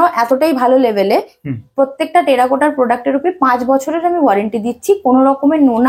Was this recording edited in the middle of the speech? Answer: no; 0 cuts

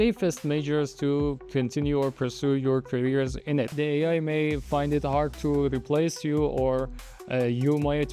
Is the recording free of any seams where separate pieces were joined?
yes; 0 cuts

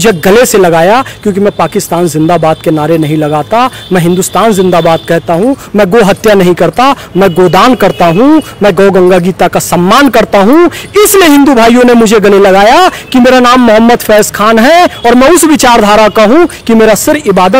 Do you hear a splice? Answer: no; 0 cuts

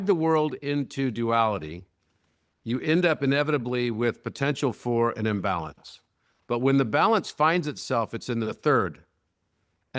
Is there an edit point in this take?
no; 0 cuts

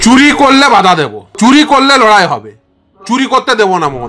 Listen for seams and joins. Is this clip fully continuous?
no; 1 cut; at 1.2 s

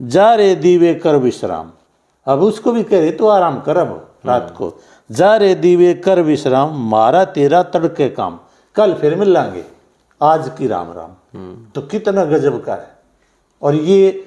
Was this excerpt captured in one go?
yes; 0 cuts

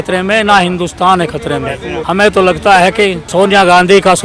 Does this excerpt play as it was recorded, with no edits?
no; 2 cuts; at 2.0 s, 3.2 s

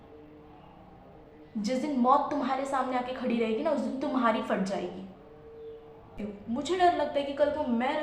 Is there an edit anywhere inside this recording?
yes; 1 cut; at 6.2 s

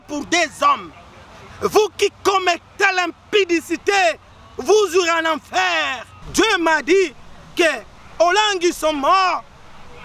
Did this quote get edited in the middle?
yes; 1 cut; at 6.2 s

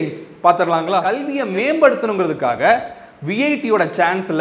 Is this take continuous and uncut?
no; 1 cut; at 1.3 s

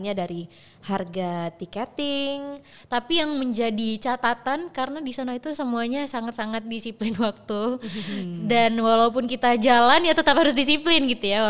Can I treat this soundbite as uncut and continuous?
no; 1 cut; at 2.7 s

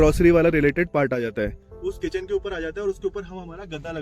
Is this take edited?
yes; 1 cut; at 1.7 s

